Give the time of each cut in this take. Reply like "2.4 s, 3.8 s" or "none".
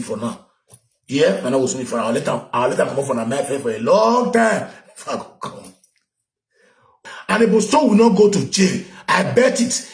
7.0 s